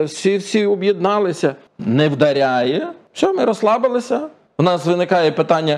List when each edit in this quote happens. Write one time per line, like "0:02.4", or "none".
0:01.7
0:03.0
0:04.4